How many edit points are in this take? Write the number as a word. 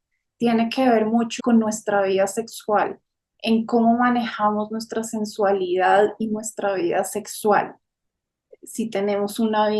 one